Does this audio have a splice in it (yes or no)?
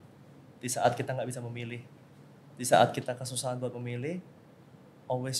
no